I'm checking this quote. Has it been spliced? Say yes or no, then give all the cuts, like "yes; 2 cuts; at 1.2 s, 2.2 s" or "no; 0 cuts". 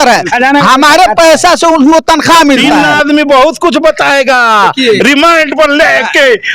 yes; 1 cut; at 2.8 s